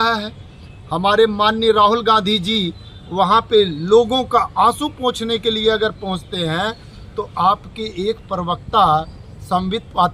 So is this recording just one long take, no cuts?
yes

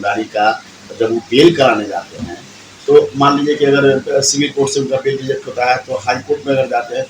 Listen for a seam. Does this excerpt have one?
no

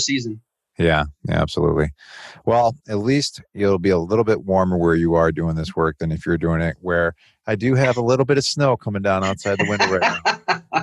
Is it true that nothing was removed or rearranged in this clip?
yes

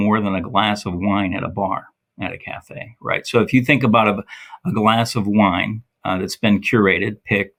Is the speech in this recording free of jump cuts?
yes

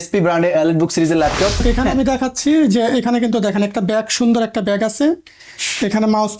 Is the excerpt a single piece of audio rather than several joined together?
no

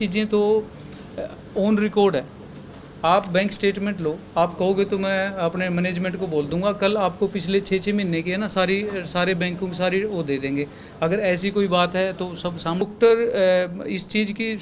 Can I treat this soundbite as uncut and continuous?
no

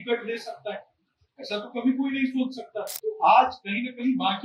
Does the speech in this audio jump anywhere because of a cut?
yes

